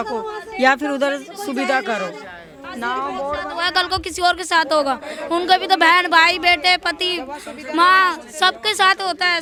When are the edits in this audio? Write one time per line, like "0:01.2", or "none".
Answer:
none